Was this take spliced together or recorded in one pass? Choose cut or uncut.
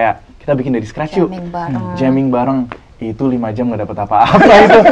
uncut